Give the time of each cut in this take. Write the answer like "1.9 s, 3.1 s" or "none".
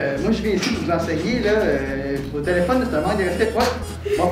none